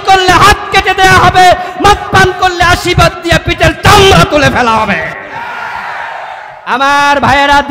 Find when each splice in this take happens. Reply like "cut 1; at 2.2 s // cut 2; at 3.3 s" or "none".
cut 1; at 6.6 s